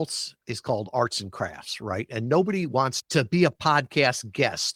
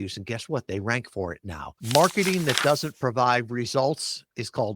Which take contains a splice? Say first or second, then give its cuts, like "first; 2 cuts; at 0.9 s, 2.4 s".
second; 1 cut; at 1.8 s